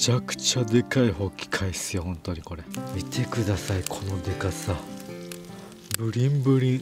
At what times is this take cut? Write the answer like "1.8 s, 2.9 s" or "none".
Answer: 2.8 s

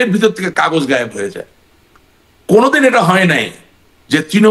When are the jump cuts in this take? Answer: none

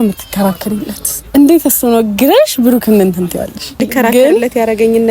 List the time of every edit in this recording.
3.8 s

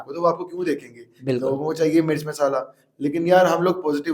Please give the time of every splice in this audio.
none

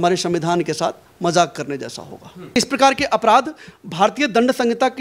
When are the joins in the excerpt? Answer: 2.6 s

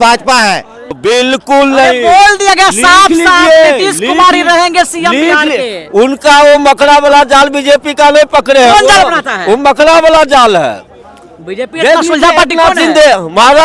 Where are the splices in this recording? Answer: 0.9 s

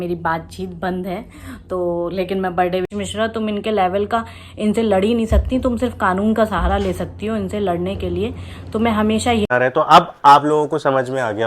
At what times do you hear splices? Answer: 2.9 s, 9.5 s

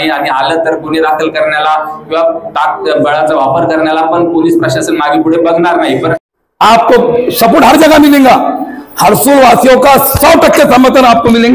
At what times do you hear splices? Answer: 6.2 s

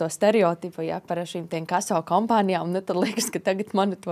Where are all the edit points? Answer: none

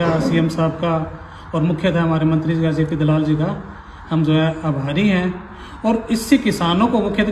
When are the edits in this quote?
none

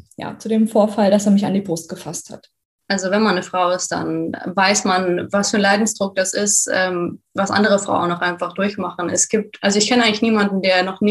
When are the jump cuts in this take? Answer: 2.7 s

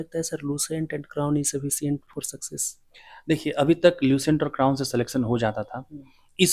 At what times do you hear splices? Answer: none

